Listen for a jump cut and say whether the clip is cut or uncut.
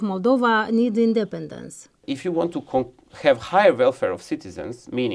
cut